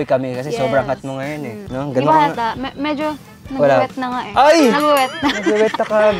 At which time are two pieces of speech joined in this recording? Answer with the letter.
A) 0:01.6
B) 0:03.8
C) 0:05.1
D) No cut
A